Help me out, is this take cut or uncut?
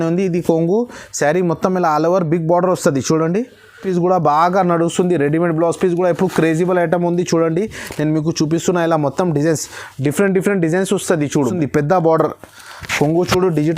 cut